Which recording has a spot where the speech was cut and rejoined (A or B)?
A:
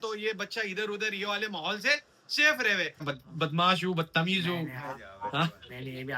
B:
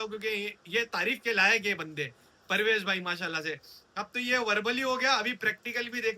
A